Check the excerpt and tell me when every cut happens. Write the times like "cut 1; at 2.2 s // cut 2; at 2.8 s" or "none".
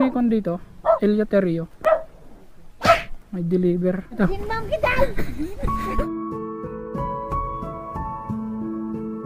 cut 1; at 1.0 s // cut 2; at 4.2 s